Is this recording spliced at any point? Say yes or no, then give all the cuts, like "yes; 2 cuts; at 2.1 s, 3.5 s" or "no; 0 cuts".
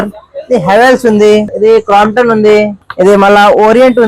yes; 2 cuts; at 1.5 s, 2.8 s